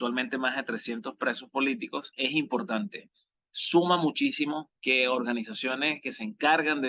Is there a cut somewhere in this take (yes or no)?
no